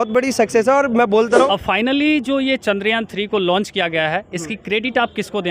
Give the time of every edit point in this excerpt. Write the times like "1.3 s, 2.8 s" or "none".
1.5 s